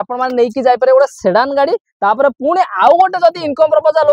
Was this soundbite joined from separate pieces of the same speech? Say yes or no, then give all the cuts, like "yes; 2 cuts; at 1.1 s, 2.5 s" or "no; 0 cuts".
no; 0 cuts